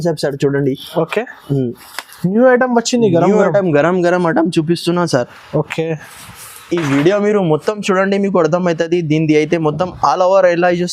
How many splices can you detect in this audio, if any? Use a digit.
0